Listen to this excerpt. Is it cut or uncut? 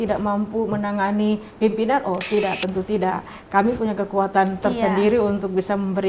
uncut